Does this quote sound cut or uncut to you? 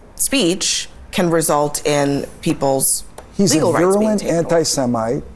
cut